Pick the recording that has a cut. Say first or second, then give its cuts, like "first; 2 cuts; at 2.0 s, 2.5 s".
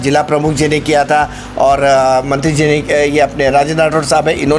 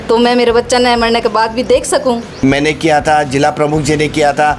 second; 1 cut; at 2.3 s